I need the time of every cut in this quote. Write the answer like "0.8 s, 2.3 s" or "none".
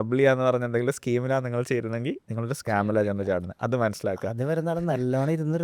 none